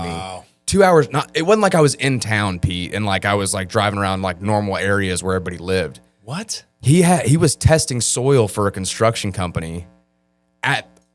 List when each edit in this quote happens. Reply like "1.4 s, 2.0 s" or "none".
none